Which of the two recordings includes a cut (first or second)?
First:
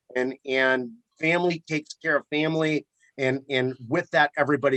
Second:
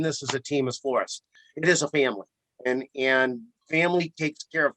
second